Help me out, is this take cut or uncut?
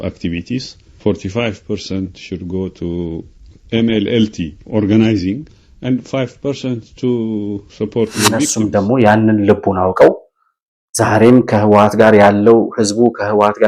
cut